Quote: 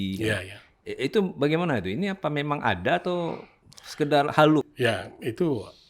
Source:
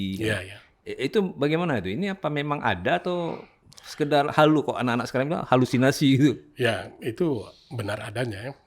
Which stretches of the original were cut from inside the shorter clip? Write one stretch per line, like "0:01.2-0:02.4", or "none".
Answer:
0:04.7-0:06.5